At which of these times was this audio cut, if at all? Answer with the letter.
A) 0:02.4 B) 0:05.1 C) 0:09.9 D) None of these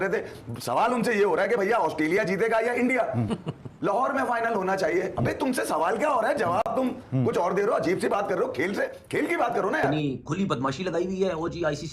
C